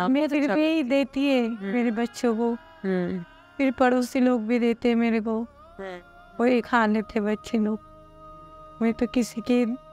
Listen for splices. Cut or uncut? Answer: uncut